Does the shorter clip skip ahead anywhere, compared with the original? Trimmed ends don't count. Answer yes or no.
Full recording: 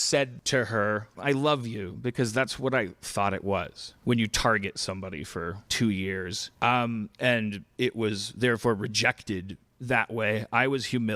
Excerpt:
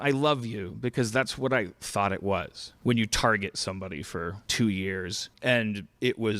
yes